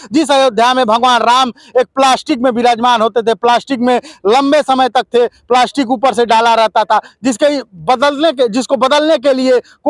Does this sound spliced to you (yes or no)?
no